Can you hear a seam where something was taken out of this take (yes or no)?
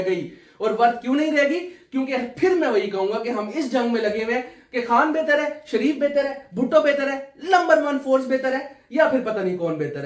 no